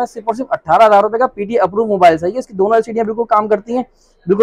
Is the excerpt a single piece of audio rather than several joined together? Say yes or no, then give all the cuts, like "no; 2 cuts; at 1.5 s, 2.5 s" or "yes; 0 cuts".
yes; 0 cuts